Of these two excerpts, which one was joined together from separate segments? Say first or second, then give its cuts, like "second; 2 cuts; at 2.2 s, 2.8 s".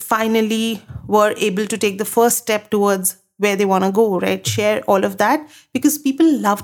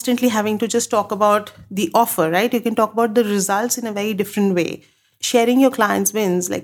second; 1 cut; at 5.1 s